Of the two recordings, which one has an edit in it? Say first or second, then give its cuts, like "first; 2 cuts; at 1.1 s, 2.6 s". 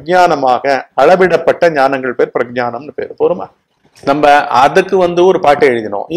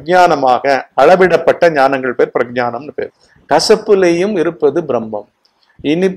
second; 1 cut; at 3.0 s